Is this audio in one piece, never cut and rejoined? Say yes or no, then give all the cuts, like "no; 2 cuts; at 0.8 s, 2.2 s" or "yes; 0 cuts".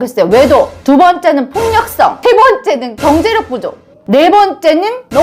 yes; 0 cuts